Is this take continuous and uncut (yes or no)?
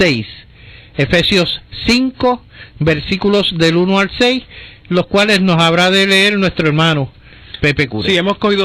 yes